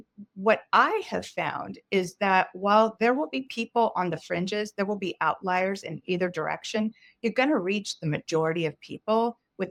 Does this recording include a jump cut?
no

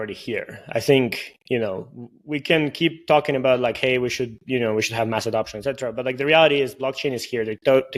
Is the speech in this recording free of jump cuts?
yes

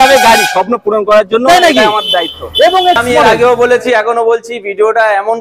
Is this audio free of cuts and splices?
no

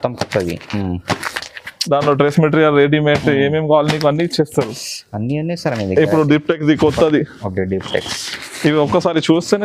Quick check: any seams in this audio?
no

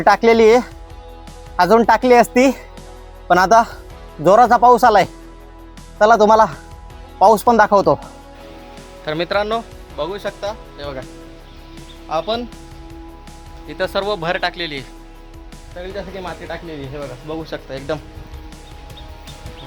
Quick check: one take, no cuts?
yes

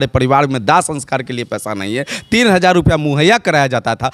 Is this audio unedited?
yes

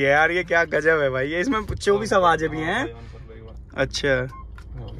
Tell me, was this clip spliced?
no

